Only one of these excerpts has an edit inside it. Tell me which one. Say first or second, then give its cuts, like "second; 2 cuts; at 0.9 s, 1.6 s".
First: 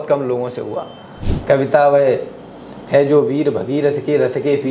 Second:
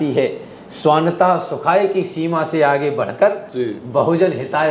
first; 1 cut; at 1.2 s